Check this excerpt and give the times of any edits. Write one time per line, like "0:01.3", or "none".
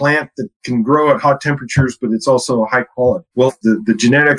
0:03.4